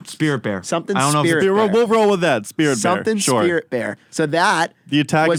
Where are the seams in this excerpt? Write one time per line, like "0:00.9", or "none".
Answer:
none